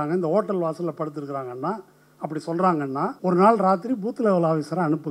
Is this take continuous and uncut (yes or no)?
no